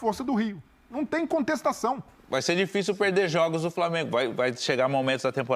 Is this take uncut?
no; 1 cut; at 2.1 s

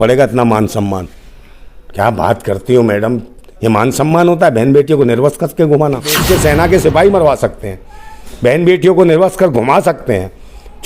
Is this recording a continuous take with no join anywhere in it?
no; 1 cut; at 6.2 s

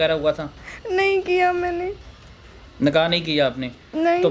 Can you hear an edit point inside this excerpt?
no; 0 cuts

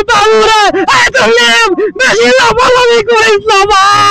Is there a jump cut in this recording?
no; 0 cuts

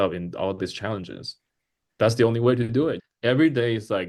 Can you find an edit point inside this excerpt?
yes; 1 cut; at 3.1 s

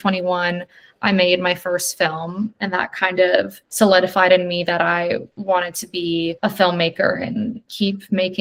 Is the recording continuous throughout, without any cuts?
yes; 0 cuts

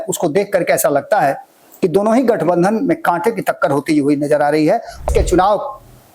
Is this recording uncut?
no; 1 cut; at 5.1 s

